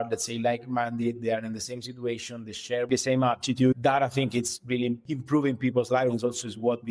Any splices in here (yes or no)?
yes